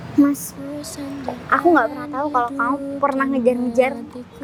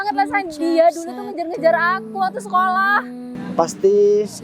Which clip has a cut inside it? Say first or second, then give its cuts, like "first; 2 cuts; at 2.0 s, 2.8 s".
second; 1 cut; at 3.4 s